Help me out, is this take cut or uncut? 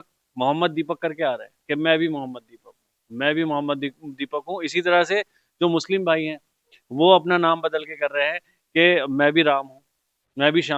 uncut